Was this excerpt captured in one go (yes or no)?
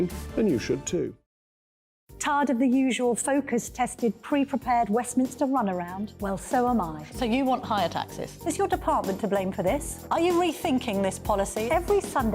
no